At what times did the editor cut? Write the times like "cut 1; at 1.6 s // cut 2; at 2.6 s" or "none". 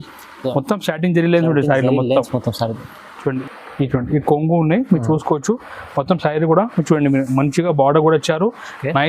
cut 1; at 3.3 s